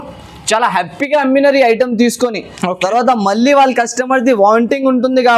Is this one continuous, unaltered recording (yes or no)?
yes